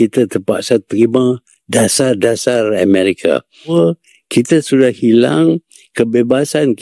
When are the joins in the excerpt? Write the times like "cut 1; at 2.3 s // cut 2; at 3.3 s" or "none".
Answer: cut 1; at 3.7 s